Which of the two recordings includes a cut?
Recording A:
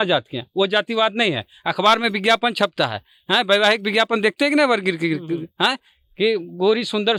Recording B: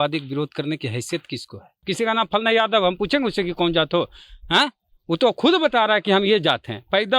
B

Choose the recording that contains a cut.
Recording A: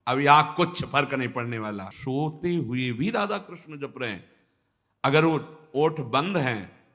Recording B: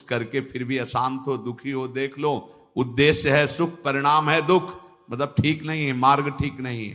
A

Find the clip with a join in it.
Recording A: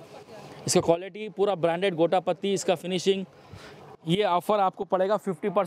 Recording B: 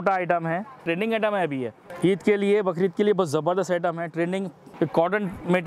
B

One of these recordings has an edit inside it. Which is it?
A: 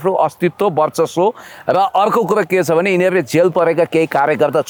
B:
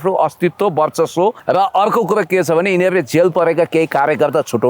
B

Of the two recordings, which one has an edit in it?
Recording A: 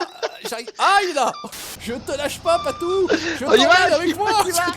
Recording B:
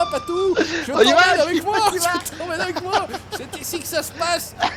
A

